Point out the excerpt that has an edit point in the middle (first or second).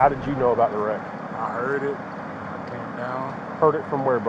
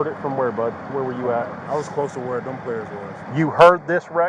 second